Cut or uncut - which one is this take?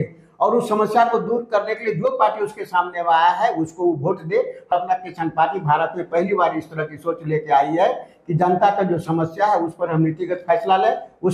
cut